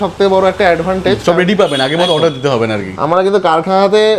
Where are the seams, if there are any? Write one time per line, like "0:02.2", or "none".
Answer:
none